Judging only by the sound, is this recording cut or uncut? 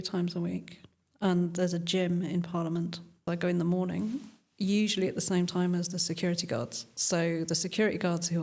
cut